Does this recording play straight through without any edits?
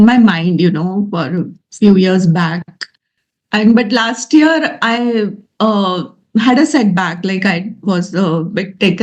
yes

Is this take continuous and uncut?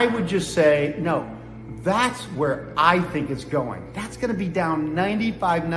yes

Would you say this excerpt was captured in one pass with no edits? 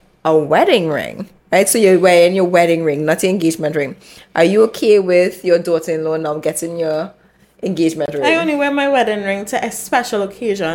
yes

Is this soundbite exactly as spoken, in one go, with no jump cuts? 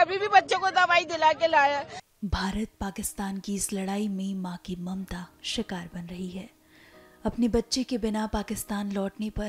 yes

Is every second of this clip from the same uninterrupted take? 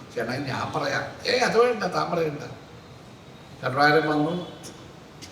yes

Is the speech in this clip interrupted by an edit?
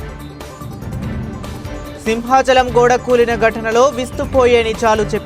no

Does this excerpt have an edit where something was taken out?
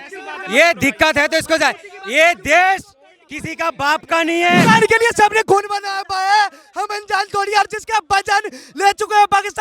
yes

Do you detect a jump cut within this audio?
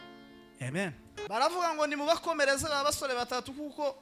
yes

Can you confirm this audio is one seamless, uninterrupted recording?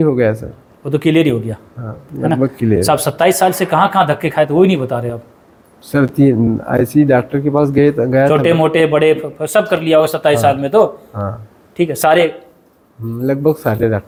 yes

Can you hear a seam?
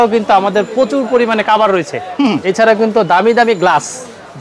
yes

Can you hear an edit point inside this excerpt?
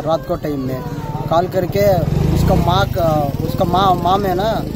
no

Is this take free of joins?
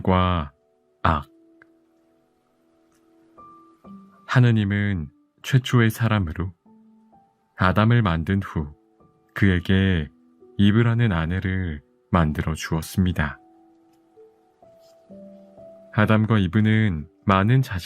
no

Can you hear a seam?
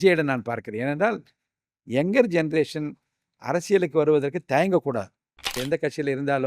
yes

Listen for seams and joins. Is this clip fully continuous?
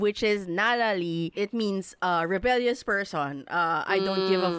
no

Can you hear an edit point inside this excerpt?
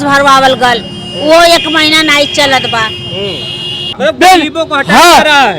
yes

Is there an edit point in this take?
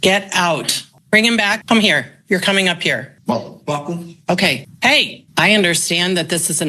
yes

